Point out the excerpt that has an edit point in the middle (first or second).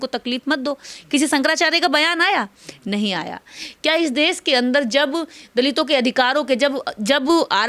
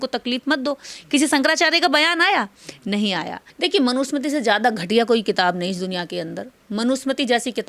second